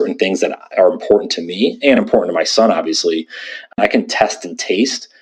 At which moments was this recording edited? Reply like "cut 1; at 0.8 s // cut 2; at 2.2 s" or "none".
cut 1; at 3.8 s